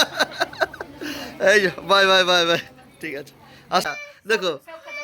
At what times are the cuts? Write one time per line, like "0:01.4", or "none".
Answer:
0:04.0